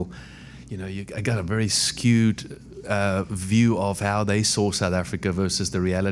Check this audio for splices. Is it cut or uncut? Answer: uncut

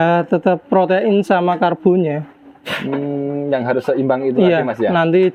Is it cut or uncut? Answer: uncut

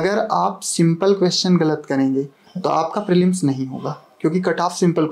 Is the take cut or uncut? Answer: uncut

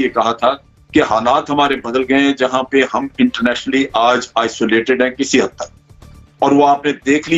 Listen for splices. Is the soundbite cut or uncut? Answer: uncut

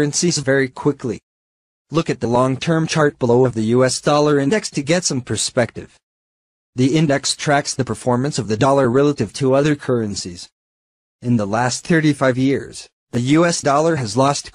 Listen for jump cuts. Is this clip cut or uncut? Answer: uncut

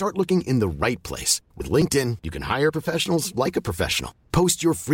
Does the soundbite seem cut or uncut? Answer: uncut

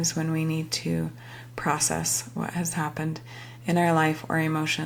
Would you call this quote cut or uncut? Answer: uncut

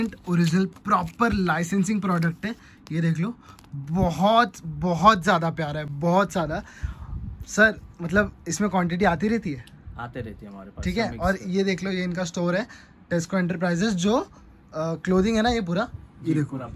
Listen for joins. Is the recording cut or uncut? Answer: uncut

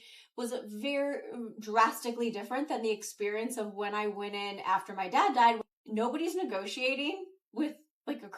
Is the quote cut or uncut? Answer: cut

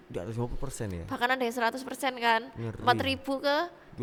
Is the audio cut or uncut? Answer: uncut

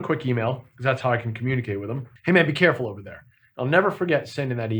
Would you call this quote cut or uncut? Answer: cut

